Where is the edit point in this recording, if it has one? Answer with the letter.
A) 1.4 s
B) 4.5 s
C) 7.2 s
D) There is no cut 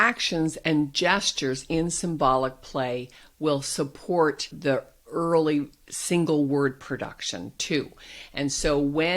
B